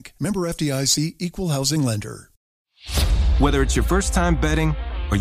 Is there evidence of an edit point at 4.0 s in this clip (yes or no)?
no